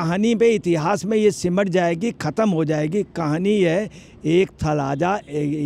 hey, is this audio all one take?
yes; 0 cuts

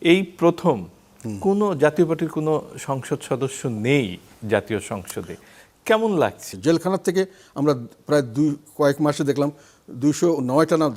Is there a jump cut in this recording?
yes; 1 cut; at 6.5 s

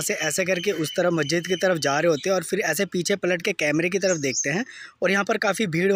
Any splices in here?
no; 0 cuts

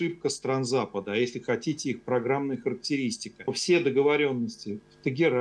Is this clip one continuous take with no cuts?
no; 1 cut; at 3.5 s

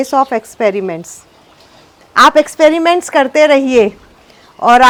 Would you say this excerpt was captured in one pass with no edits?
yes; 0 cuts

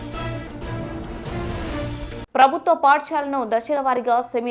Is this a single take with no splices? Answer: no; 2 cuts; at 1.2 s, 2.1 s

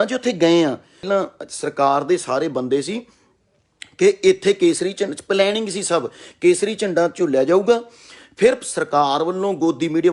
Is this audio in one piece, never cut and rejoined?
no; 1 cut; at 1.1 s

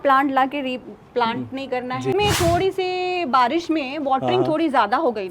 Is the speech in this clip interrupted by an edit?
yes; 1 cut; at 2.1 s

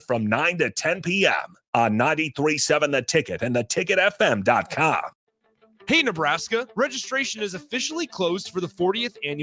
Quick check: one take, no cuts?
yes; 0 cuts

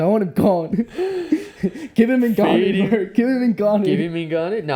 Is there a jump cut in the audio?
no; 0 cuts

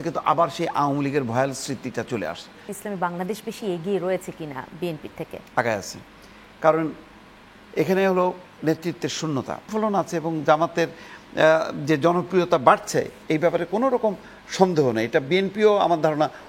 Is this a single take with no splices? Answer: no; 2 cuts; at 2.7 s, 9.7 s

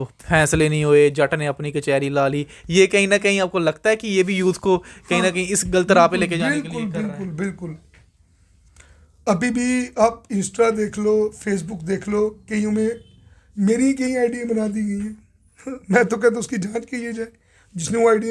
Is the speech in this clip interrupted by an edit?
no; 0 cuts

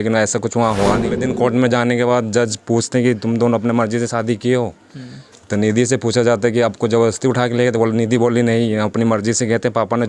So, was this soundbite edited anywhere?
yes; 1 cut; at 1.2 s

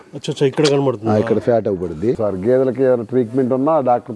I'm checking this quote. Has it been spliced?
yes; 1 cut; at 2.2 s

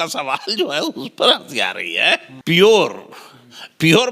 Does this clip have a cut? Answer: yes; 1 cut; at 2.3 s

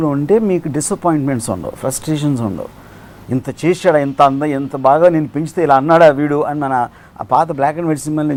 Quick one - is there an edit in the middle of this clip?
no; 0 cuts

